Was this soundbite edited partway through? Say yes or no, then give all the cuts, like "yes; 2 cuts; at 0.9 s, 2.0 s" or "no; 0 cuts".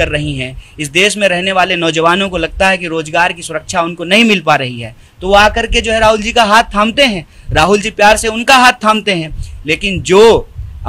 no; 0 cuts